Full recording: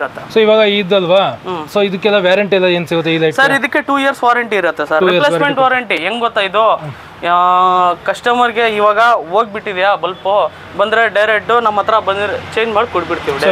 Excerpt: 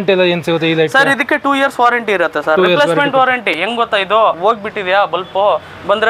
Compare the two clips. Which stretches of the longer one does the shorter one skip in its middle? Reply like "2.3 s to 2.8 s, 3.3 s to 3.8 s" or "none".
6.8 s to 9.3 s